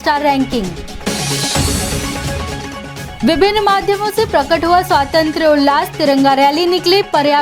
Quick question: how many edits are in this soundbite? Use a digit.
0